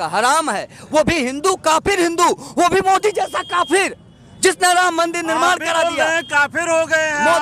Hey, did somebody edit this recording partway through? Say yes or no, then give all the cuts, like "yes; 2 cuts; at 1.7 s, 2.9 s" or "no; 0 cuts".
no; 0 cuts